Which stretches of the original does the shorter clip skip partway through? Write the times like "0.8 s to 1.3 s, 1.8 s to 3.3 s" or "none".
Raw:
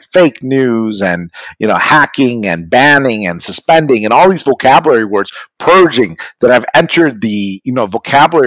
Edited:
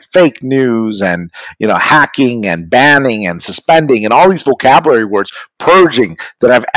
none